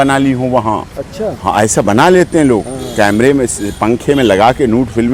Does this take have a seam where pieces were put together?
no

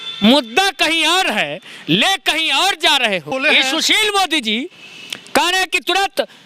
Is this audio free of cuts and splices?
no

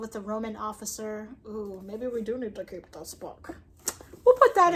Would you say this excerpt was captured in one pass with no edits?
yes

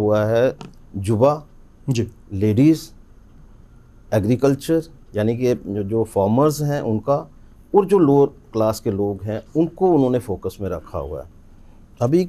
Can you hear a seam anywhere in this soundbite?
no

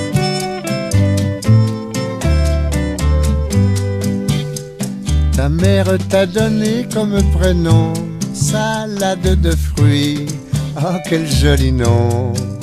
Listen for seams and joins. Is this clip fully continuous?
yes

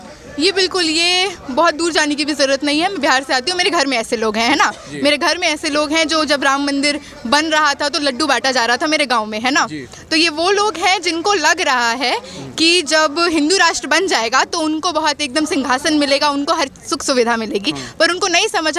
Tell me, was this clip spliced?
no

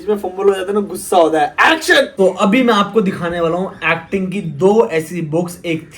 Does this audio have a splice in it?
yes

